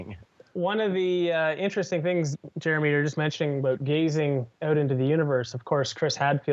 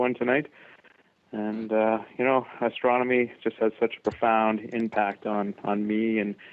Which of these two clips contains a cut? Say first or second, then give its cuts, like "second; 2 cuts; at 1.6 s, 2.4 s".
first; 1 cut; at 1.2 s